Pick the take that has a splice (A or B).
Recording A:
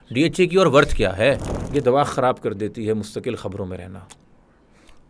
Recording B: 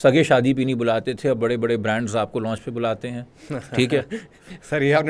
A